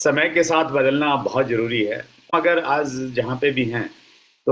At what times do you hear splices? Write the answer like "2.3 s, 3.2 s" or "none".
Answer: 2.3 s